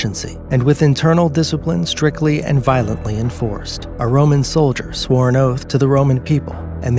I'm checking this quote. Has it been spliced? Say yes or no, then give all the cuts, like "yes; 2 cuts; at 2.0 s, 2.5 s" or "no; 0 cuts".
yes; 1 cut; at 3.6 s